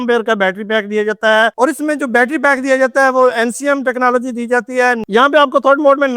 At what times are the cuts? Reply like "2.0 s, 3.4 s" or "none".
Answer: 5.0 s